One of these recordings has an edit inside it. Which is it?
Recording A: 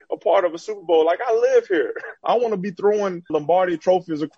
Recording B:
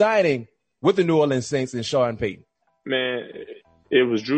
A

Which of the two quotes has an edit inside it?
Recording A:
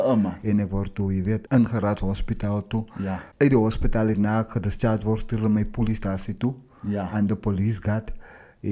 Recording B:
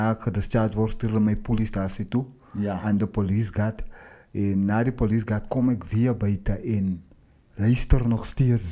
A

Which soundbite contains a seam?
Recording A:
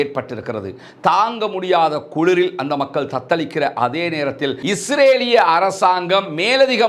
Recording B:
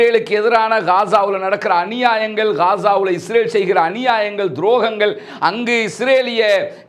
A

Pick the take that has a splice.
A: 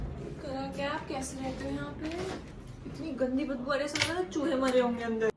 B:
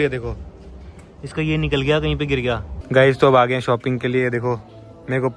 B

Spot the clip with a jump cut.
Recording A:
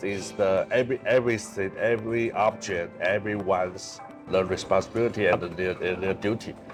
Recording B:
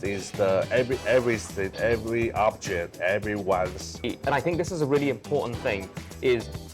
B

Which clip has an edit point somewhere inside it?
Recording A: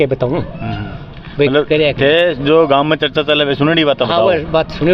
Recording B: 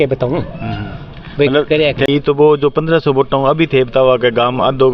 B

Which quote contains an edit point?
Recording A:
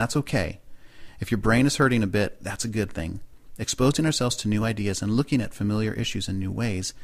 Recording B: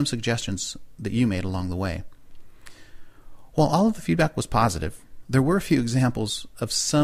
B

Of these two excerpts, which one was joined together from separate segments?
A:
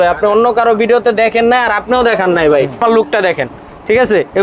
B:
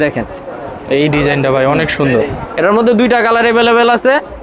A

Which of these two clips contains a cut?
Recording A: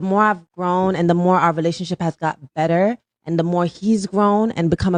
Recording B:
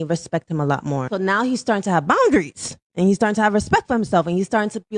B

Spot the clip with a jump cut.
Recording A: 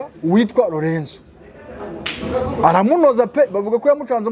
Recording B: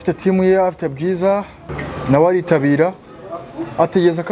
B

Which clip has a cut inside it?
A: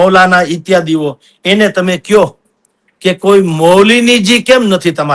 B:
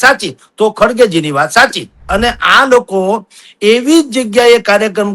B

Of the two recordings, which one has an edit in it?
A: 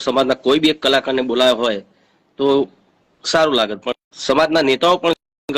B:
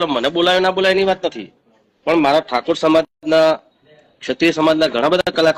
A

